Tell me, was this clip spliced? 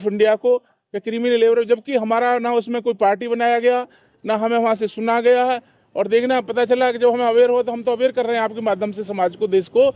no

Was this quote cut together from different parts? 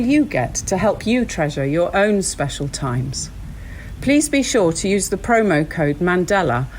no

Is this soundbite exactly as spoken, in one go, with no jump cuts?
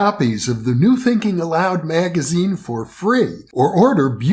yes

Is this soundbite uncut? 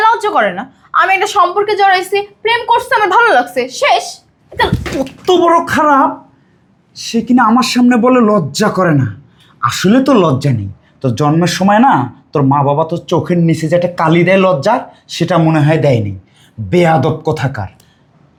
yes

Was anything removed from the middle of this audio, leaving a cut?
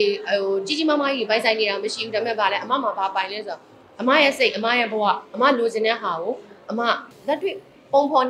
yes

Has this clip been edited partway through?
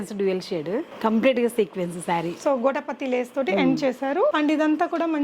yes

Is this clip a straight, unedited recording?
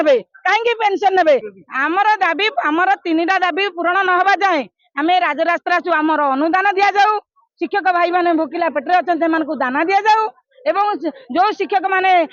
no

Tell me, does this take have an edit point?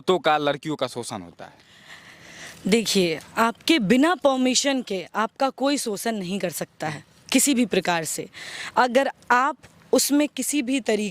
no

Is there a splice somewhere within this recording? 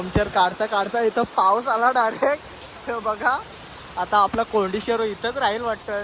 yes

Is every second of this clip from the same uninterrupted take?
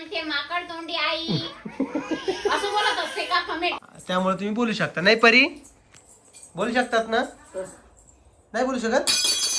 no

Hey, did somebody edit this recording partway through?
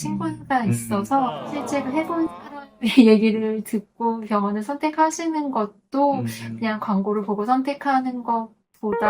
yes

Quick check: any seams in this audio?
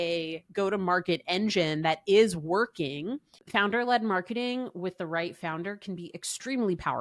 yes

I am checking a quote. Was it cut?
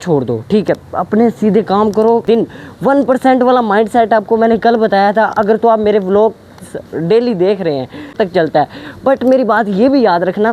yes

